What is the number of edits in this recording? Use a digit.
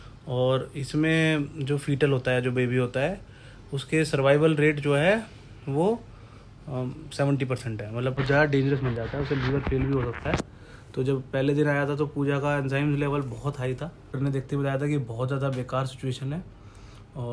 2